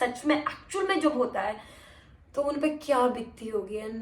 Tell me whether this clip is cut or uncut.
uncut